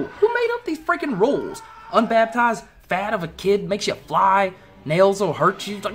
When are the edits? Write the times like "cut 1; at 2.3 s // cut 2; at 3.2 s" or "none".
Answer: none